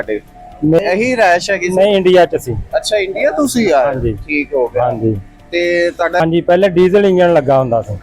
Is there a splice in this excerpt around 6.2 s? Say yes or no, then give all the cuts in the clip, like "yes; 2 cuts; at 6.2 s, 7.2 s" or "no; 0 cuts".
yes; 2 cuts; at 0.8 s, 6.2 s